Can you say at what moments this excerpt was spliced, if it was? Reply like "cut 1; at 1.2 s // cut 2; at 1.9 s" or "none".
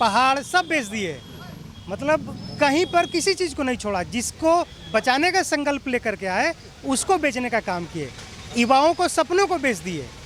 none